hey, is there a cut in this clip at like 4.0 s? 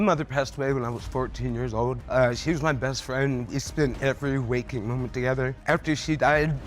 yes; 3 cuts; at 2.0 s, 4.0 s, 5.6 s

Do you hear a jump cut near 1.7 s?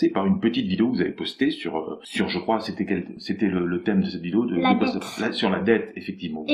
no; 1 cut; at 5.1 s

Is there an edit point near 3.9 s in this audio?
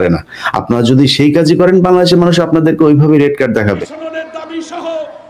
yes; 1 cut; at 3.9 s

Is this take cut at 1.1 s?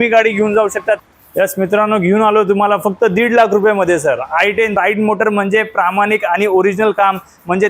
yes; 2 cuts; at 1.1 s, 4.7 s

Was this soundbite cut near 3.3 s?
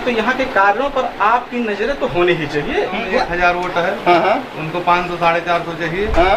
yes; 1 cut; at 3.3 s

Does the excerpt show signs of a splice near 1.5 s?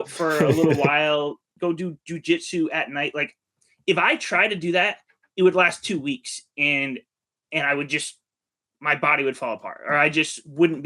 yes; 1 cut; at 1.5 s

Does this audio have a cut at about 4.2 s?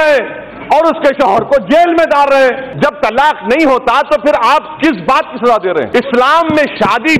no; 2 cuts; at 2.7 s, 5.9 s

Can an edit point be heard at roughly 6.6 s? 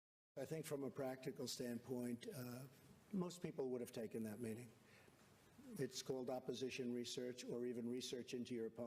yes; 1 cut; at 6.6 s

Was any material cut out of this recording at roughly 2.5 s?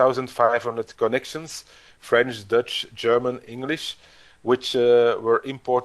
no; 0 cuts

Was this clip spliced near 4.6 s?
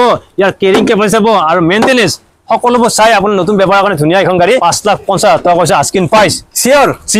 yes; 1 cut; at 4.6 s

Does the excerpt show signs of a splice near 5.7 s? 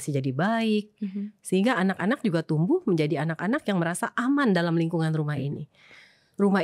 no; 0 cuts

